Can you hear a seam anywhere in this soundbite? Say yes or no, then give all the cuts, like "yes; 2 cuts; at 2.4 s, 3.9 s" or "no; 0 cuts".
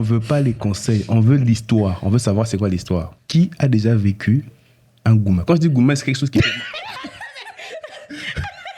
yes; 1 cut; at 3.2 s